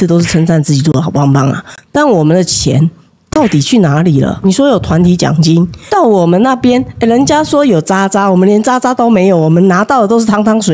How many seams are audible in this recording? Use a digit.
2